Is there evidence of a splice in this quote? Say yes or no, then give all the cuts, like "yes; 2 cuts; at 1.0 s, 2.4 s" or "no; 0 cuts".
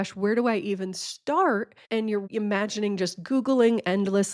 yes; 1 cut; at 2.1 s